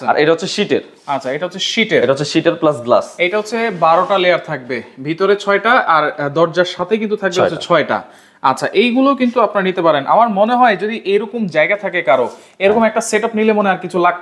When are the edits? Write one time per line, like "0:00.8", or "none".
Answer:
none